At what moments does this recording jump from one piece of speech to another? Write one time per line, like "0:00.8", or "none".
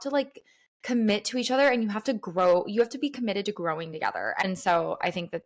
0:04.5